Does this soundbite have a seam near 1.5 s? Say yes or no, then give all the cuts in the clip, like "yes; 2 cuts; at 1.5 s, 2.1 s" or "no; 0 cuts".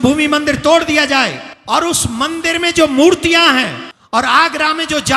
yes; 2 cuts; at 1.5 s, 3.9 s